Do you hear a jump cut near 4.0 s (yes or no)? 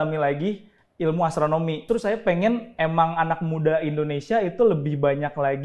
no